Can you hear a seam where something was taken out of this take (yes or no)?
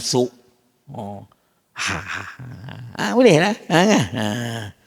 no